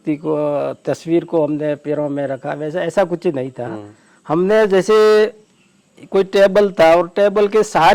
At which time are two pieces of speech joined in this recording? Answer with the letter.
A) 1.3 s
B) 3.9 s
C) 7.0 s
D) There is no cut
D